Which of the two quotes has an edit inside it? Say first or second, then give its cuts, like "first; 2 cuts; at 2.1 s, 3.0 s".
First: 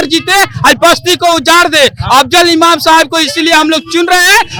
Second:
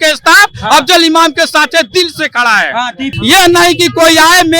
second; 1 cut; at 3.1 s